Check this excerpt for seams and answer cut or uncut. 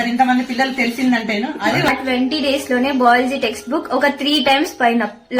cut